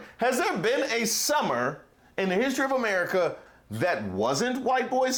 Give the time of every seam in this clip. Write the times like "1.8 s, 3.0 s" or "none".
none